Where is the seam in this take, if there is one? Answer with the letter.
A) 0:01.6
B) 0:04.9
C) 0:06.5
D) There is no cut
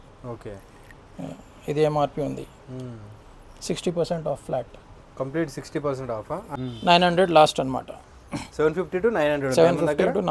C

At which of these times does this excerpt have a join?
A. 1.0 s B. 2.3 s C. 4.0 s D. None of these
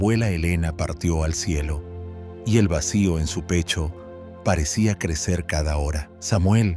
D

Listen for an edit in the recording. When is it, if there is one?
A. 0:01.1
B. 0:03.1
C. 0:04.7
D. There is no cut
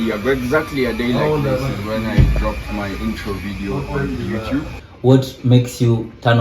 C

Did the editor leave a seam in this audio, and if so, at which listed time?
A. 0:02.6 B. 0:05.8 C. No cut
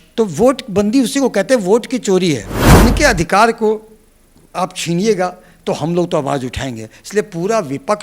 A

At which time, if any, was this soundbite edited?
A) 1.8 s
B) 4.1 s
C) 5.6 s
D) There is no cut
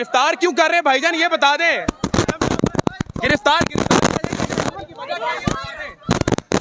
B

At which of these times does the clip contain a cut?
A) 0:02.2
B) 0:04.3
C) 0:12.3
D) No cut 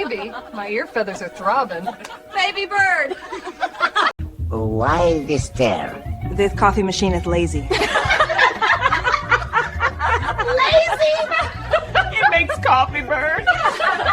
B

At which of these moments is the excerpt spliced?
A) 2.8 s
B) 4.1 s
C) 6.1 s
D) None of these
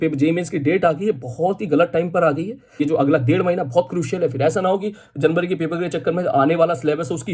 A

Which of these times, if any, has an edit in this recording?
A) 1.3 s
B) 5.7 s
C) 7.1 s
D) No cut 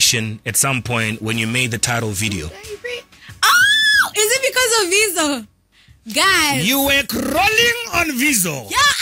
D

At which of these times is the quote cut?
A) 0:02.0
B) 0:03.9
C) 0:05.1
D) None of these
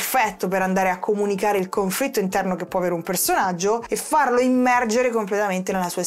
B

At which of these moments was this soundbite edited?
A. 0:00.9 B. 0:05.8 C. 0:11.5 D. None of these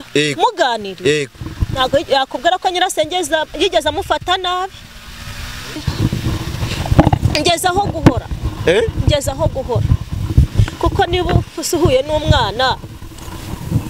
B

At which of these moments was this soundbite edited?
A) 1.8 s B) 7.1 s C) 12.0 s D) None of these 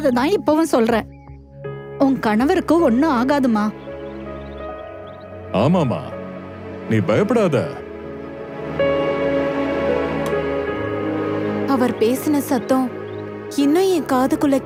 D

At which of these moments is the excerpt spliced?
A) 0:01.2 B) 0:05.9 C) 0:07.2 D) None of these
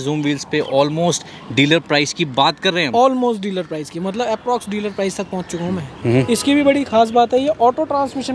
B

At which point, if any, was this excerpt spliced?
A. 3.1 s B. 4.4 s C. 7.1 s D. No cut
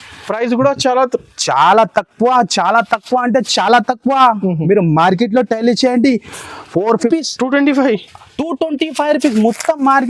C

